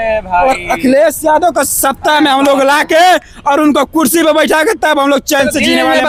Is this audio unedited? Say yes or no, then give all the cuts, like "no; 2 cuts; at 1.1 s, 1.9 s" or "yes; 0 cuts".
yes; 0 cuts